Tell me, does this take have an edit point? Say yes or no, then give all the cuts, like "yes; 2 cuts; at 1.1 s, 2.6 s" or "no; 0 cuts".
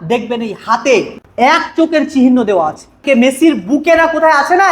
yes; 2 cuts; at 1.2 s, 3.0 s